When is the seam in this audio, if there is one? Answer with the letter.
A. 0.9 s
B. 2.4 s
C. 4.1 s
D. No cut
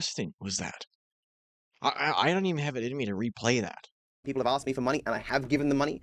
C